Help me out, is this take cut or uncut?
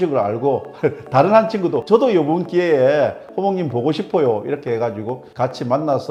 uncut